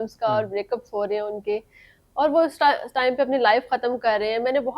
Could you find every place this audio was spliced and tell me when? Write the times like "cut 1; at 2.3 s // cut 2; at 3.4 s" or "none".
none